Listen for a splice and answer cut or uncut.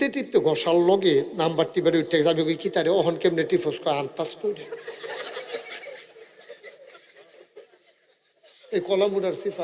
uncut